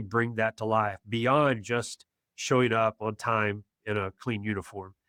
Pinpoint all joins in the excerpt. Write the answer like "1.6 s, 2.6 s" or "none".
none